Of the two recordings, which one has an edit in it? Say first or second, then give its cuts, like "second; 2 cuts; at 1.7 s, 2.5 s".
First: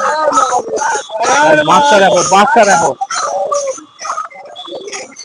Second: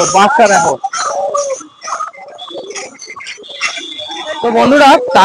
second; 1 cut; at 4.2 s